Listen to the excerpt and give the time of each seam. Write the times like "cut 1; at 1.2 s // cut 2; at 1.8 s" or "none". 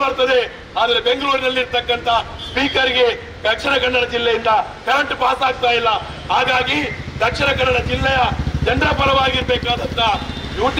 none

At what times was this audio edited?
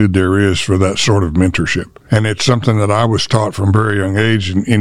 cut 1; at 1.9 s

